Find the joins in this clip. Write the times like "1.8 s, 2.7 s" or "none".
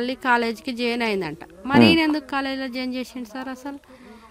none

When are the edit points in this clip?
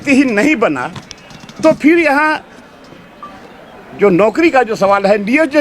none

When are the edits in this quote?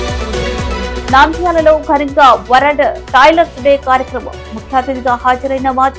none

